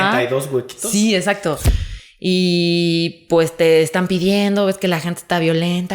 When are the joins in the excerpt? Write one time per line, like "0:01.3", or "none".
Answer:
0:01.7